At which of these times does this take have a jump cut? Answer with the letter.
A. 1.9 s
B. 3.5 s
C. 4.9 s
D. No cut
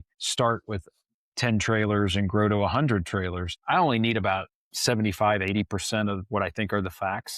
B